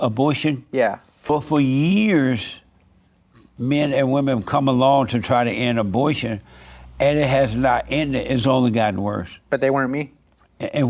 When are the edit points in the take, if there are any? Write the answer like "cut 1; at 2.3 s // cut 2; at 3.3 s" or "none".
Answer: cut 1; at 1.1 s